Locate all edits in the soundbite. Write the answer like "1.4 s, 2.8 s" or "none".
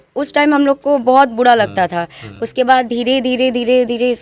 none